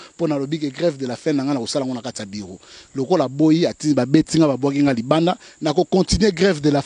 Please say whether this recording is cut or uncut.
uncut